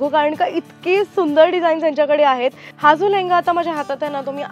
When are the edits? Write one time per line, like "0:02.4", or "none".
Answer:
0:02.7